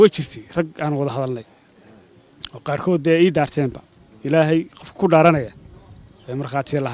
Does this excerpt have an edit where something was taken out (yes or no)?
no